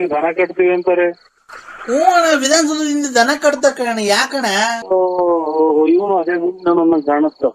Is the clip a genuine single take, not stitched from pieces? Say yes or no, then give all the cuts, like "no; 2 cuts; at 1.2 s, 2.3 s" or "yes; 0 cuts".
no; 1 cut; at 4.8 s